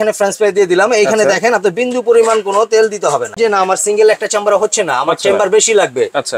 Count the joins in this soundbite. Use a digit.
1